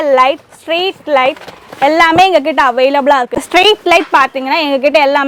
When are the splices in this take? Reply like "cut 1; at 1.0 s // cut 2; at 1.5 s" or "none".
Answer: none